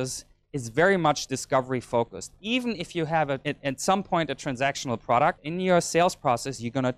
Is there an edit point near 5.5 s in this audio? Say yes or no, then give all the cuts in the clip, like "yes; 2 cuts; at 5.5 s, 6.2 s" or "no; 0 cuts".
yes; 3 cuts; at 1.3 s, 3.4 s, 5.5 s